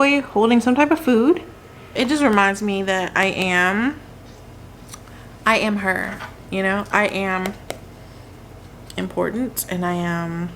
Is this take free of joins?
no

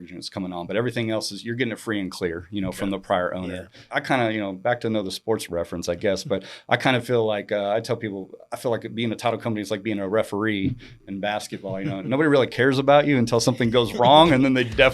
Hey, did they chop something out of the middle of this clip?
yes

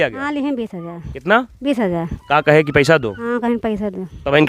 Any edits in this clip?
no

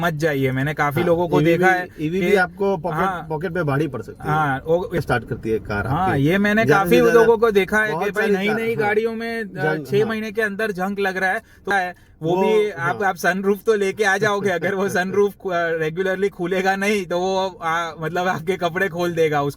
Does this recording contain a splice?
yes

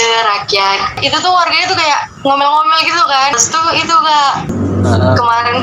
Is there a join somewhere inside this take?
yes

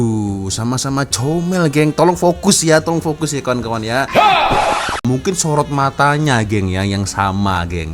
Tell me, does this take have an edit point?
yes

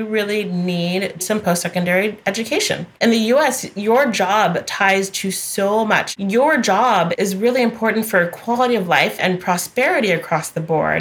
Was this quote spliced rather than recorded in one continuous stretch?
yes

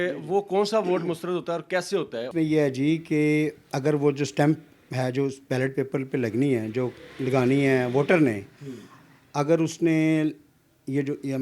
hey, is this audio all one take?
yes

